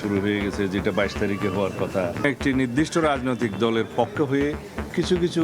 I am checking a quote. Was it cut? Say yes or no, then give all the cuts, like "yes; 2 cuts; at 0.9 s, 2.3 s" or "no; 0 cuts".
yes; 1 cut; at 2.2 s